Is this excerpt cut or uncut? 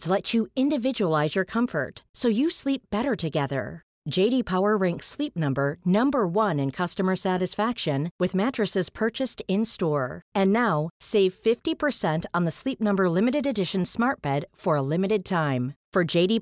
uncut